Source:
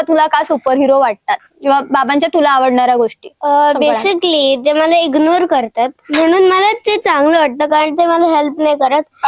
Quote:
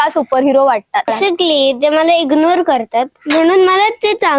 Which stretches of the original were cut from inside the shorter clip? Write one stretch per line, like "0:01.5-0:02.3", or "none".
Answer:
0:01.5-0:04.0